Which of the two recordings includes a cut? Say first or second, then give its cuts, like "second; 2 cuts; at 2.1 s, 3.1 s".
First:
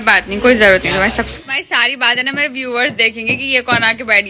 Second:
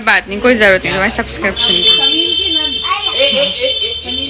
first; 1 cut; at 1.4 s